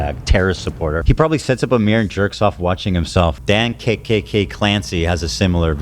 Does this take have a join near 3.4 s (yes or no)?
yes